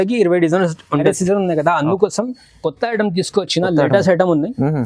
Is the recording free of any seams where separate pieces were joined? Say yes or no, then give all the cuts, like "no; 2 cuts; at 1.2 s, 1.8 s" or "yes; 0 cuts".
no; 1 cut; at 1.0 s